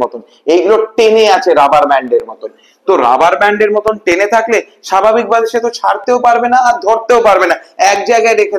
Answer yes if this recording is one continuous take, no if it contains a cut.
yes